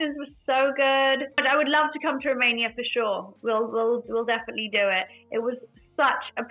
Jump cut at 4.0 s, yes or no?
no